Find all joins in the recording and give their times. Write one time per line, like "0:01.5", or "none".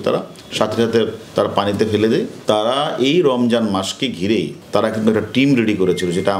0:02.3
0:04.6